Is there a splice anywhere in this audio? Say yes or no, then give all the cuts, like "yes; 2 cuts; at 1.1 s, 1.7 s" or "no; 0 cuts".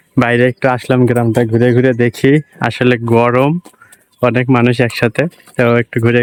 no; 0 cuts